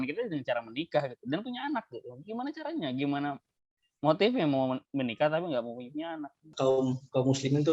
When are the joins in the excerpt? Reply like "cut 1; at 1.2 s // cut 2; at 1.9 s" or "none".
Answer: cut 1; at 6.5 s